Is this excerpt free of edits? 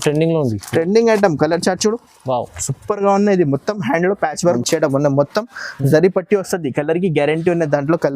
no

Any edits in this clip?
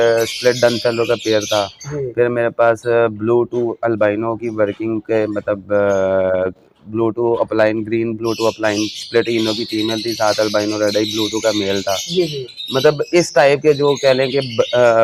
no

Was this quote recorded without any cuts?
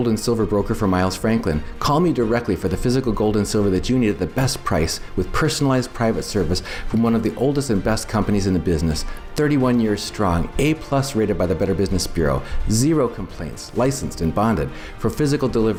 yes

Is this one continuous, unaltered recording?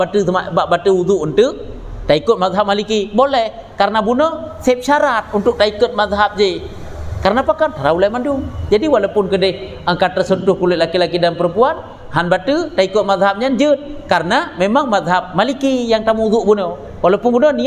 yes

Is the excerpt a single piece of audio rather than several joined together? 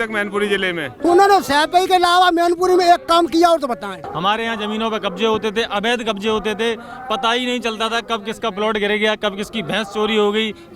no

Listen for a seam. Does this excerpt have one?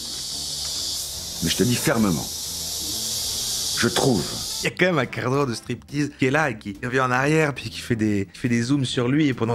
no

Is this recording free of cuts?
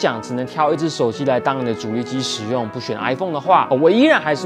yes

